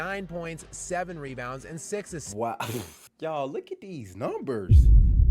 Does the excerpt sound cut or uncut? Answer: cut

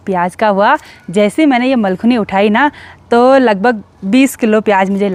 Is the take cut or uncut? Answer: uncut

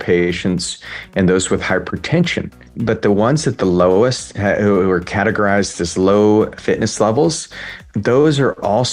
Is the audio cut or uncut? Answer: cut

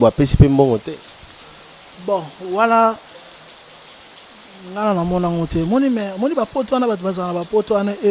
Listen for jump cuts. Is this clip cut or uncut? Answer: uncut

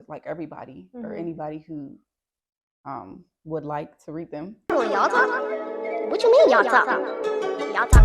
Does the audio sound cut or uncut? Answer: cut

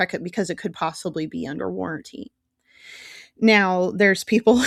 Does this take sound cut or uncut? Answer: uncut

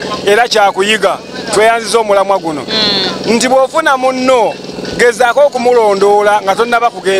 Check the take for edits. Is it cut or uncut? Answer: uncut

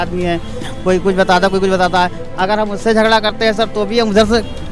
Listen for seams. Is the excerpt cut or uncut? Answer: uncut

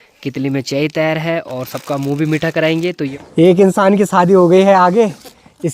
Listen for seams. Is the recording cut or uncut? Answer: cut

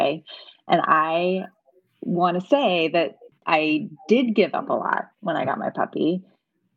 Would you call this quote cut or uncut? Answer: cut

